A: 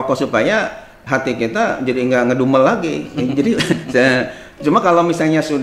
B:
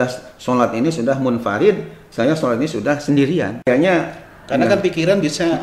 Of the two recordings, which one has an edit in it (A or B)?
B